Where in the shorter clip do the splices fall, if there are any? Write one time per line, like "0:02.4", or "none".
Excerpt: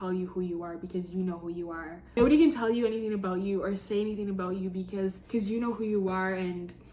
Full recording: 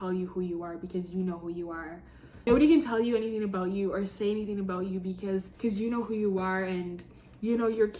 0:01.9

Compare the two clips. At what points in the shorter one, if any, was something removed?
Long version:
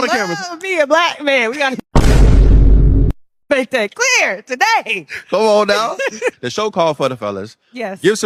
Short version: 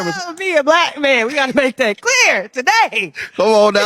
0:01.5

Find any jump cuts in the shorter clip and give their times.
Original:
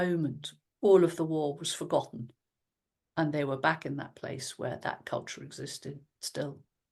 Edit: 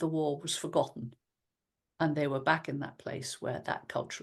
none

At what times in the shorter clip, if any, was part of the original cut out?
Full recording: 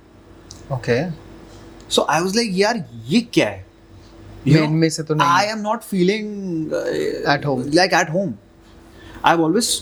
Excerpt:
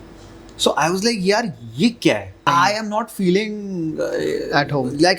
0:02.4

